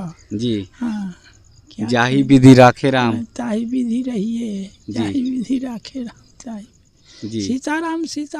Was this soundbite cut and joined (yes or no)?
no